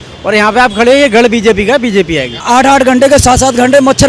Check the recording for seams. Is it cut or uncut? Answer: cut